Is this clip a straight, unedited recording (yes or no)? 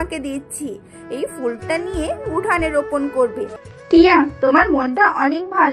no